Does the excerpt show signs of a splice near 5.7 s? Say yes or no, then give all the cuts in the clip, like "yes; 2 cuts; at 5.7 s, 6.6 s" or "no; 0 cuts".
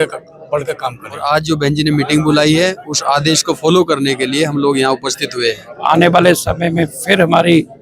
yes; 2 cuts; at 1.1 s, 5.7 s